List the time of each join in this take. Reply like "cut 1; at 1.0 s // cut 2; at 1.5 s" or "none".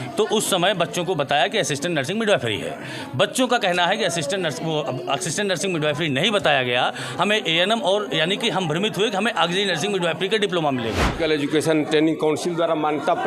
cut 1; at 11.1 s